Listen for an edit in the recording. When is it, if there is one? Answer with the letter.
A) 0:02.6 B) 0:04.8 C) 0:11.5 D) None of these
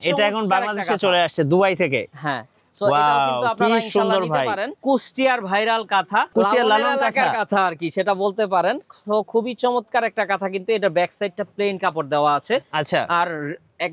B